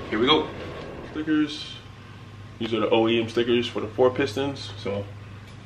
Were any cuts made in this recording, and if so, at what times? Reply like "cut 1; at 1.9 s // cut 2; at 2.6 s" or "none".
cut 1; at 1.1 s